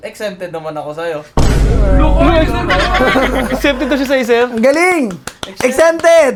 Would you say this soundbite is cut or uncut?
uncut